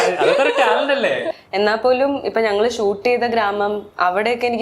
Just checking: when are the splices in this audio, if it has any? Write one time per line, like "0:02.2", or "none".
0:01.3

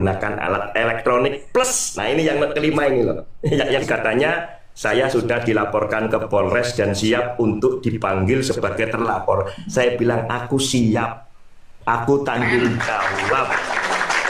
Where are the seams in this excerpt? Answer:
0:03.9

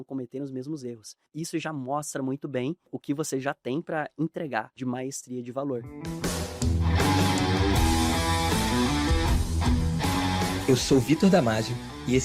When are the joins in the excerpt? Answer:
0:01.3
0:03.0
0:04.7
0:06.0

